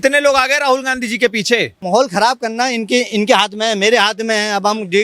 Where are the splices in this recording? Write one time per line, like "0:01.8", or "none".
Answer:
0:01.7